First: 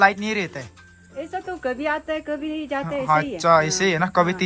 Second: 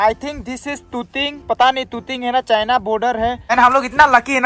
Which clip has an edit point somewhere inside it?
second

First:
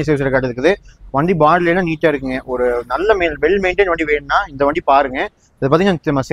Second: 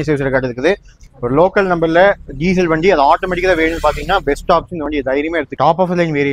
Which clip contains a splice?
second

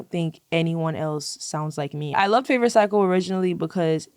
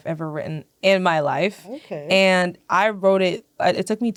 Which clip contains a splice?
first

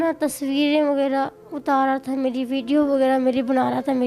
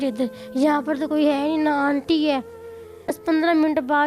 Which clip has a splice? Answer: second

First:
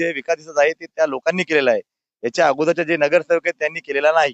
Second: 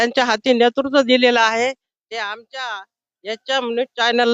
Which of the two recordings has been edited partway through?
first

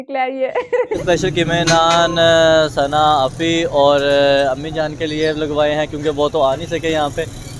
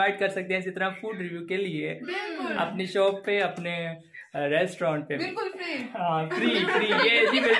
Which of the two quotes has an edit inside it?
first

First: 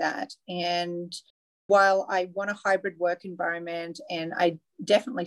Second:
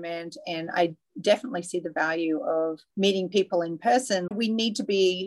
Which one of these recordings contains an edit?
second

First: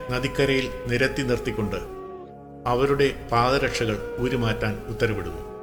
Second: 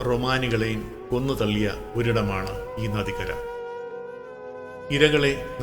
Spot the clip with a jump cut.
second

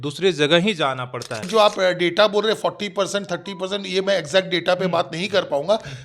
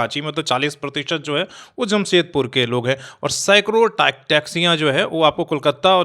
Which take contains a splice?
first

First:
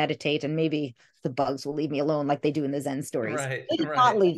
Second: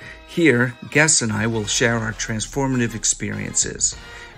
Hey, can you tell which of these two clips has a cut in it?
first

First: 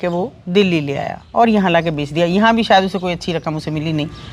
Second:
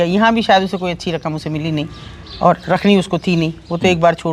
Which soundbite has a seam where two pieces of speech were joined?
first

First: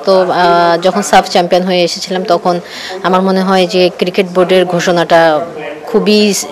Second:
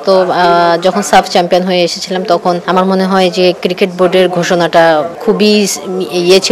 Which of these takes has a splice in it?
second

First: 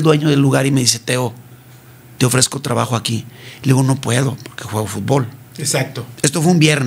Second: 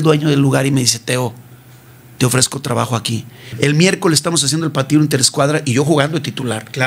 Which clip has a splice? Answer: second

